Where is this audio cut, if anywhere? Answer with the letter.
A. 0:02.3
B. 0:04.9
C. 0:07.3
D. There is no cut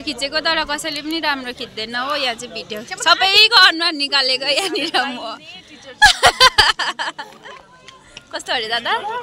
D